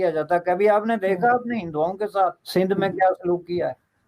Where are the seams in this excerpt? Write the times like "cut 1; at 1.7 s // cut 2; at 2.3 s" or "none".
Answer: cut 1; at 2.4 s